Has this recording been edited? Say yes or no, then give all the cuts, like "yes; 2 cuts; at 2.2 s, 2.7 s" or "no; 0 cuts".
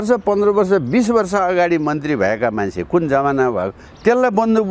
no; 0 cuts